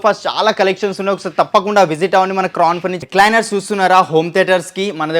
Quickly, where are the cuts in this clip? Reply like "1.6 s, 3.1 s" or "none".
2.9 s